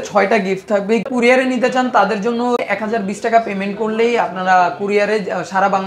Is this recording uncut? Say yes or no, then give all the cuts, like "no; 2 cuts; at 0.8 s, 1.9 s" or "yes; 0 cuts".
no; 2 cuts; at 1.1 s, 2.6 s